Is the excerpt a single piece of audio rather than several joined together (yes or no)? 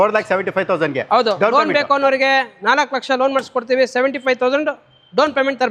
yes